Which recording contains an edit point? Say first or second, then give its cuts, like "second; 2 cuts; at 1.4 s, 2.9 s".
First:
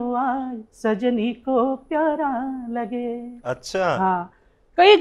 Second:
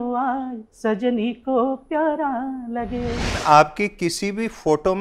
second; 1 cut; at 3.4 s